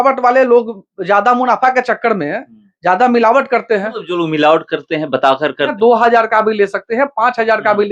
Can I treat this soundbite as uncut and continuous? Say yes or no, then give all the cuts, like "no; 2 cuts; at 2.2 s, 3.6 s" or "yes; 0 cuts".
no; 1 cut; at 5.7 s